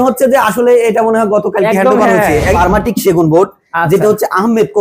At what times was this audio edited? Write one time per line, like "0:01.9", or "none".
0:02.6